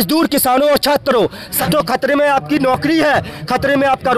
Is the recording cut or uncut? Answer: cut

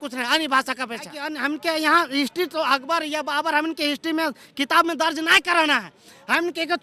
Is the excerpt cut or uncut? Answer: cut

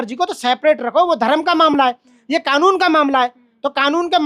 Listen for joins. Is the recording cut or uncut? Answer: uncut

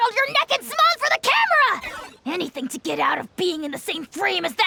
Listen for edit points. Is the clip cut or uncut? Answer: uncut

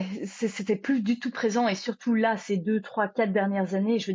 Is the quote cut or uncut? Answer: uncut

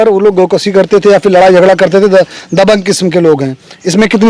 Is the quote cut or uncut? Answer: uncut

